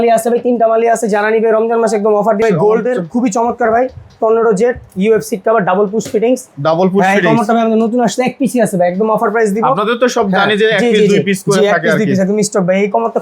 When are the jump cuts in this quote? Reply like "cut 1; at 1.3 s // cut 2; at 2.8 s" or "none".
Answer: cut 1; at 2.4 s